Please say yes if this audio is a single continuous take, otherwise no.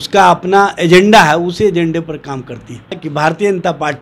no